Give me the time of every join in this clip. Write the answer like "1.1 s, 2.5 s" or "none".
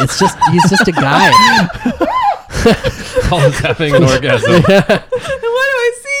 none